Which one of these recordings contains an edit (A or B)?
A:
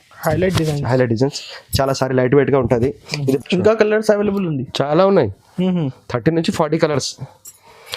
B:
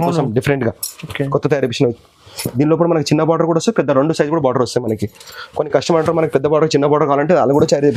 A